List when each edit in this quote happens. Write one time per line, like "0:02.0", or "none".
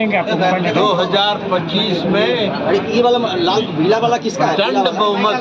none